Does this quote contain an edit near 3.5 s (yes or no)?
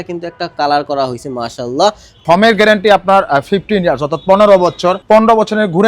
no